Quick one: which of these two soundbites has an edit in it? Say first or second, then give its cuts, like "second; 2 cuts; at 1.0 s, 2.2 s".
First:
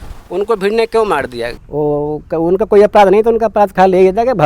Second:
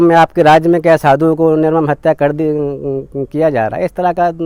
first; 1 cut; at 1.5 s